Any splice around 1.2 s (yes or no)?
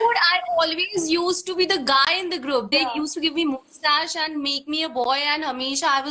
no